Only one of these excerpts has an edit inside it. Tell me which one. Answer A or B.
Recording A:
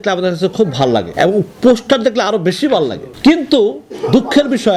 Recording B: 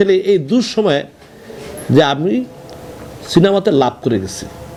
A